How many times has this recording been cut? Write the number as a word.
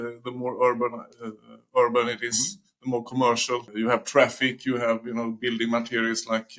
one